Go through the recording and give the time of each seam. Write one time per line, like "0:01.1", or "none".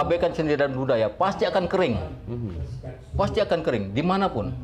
none